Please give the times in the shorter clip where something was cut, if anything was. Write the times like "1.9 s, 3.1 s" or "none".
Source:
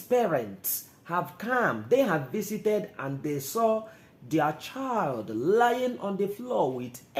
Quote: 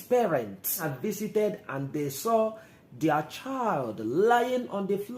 0.9 s